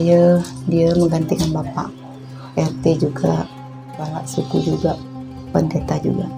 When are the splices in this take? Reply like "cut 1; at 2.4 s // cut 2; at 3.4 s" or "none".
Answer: none